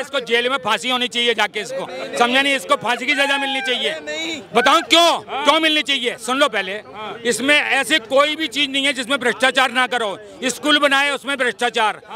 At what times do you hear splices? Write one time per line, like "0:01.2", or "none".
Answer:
none